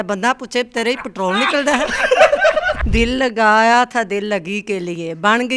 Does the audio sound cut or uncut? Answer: cut